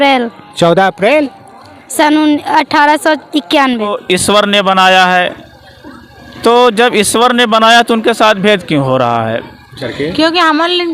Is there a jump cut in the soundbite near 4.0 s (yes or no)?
yes